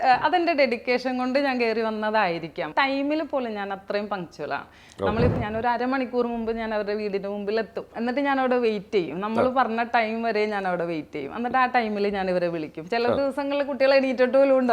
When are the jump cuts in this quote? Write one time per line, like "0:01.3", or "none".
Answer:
0:02.7
0:05.3
0:07.9